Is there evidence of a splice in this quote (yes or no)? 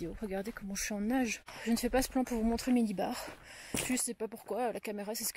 yes